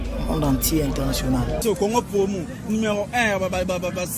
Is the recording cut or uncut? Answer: cut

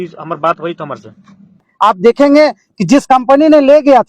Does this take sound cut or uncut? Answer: cut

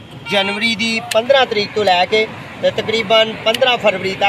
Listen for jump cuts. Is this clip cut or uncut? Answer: uncut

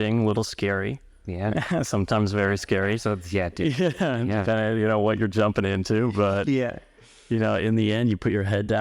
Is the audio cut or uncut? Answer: uncut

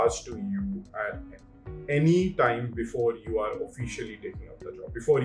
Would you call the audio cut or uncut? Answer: uncut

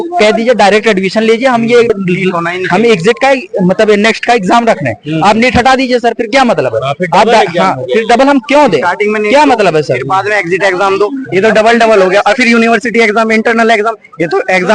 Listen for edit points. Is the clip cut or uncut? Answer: cut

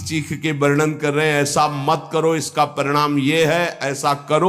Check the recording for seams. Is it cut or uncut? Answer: uncut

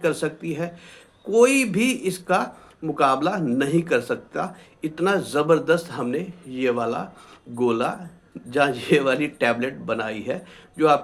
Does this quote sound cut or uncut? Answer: uncut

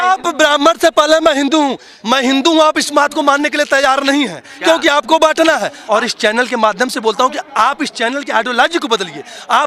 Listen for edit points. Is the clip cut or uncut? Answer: cut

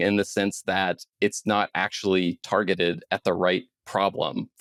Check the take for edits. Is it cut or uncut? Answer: uncut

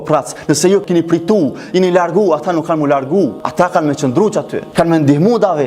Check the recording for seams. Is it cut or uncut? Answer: cut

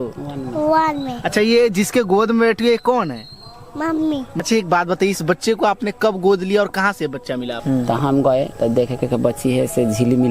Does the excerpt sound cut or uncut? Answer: cut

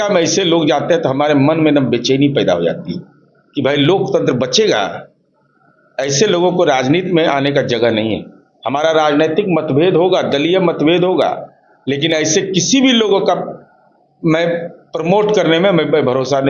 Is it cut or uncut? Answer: uncut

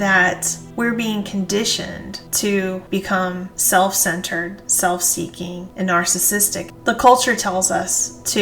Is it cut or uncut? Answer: cut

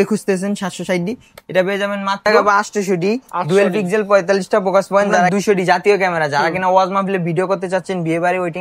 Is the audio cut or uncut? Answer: cut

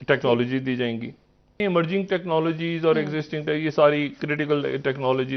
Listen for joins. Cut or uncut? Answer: cut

